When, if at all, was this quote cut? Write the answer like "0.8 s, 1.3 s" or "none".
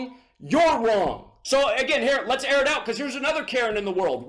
1.3 s